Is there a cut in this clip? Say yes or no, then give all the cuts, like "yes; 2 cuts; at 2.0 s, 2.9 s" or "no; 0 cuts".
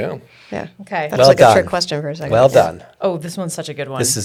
no; 0 cuts